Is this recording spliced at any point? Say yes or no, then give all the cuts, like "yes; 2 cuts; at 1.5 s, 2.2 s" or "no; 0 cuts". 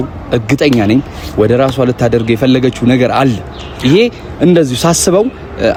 no; 0 cuts